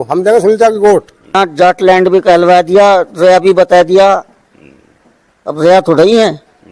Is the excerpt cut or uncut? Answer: cut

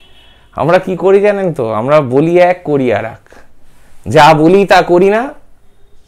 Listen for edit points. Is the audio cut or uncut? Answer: uncut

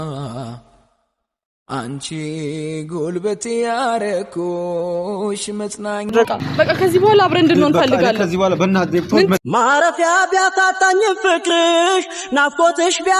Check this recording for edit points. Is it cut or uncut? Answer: cut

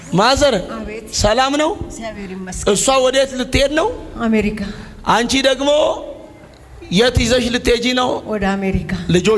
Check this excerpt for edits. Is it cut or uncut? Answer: uncut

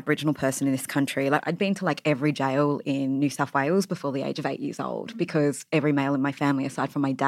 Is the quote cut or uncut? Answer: cut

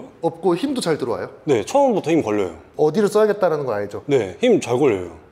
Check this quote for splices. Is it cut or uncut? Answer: cut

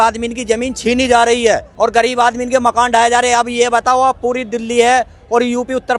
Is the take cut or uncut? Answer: cut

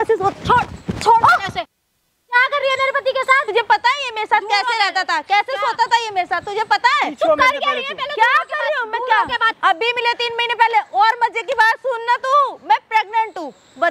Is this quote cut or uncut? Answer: cut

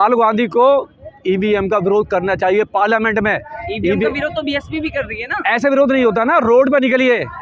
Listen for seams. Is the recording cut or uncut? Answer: uncut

